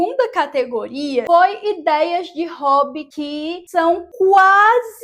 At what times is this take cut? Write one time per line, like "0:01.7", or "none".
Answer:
0:01.3
0:03.1